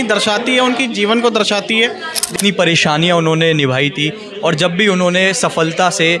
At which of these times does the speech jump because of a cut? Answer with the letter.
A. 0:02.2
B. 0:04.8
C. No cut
A